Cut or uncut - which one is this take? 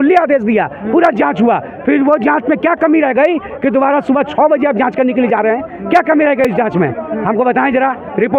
uncut